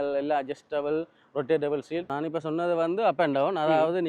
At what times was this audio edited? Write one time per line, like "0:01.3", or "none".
0:02.1